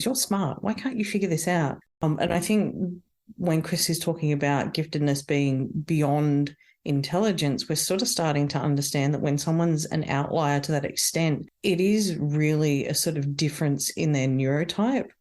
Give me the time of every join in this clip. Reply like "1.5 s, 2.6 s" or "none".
1.8 s